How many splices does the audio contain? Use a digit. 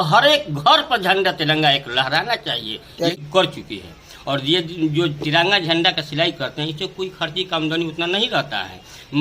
1